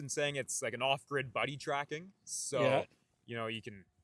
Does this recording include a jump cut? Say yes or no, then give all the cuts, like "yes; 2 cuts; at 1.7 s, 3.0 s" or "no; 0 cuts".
no; 0 cuts